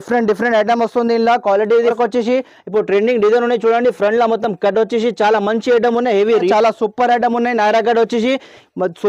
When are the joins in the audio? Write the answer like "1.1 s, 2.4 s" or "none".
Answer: 1.9 s, 6.5 s